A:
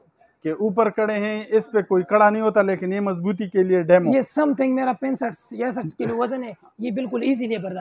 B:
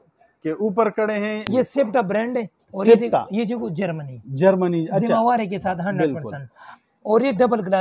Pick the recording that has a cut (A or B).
B